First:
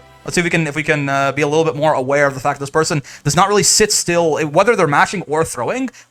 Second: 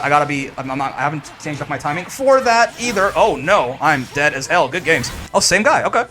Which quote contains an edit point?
second; 1 cut; at 5.1 s

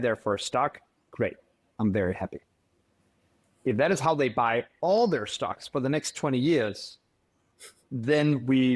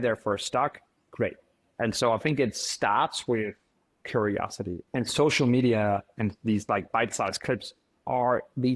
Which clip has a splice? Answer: second; 2 cuts; at 1.6 s, 4.8 s

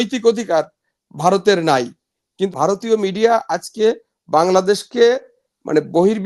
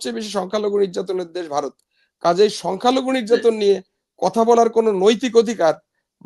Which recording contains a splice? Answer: first; 1 cut; at 2.5 s

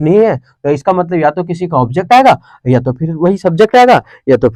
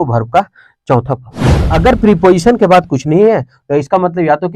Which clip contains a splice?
second; 1 cut; at 1.7 s

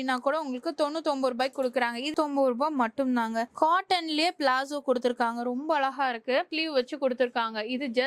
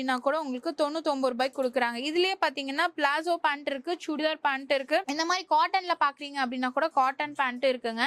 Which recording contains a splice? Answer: first; 2 cuts; at 2.1 s, 6.5 s

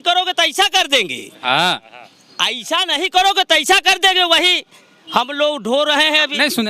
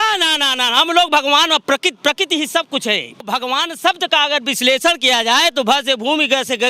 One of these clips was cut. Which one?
second; 1 cut; at 3.2 s

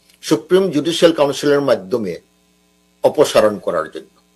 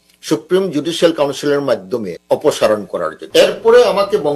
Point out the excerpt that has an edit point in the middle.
second; 2 cuts; at 2.1 s, 3.2 s

